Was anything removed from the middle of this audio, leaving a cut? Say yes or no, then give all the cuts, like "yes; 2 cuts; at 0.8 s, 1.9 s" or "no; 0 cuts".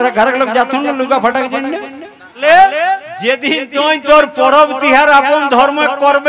yes; 1 cut; at 2.4 s